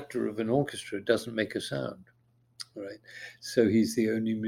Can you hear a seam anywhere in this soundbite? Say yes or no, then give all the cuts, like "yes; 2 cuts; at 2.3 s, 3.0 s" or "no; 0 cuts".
no; 0 cuts